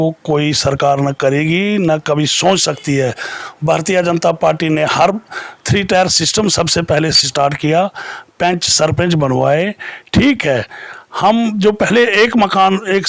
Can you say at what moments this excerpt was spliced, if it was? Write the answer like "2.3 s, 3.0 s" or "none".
none